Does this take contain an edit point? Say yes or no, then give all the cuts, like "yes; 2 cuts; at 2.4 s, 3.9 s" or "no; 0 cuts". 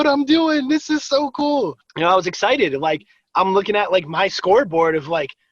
no; 0 cuts